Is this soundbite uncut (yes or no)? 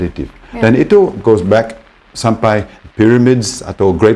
yes